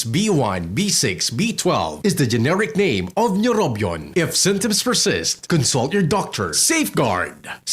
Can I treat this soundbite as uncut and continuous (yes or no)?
no